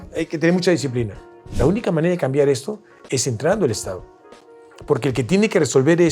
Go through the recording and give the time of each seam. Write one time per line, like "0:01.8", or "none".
0:01.5